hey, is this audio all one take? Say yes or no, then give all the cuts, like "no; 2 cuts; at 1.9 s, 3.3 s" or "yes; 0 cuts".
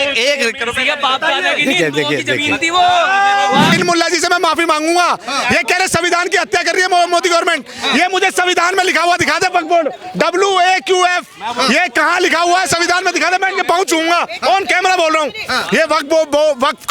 no; 1 cut; at 3.7 s